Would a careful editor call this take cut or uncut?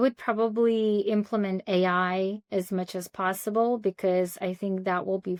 uncut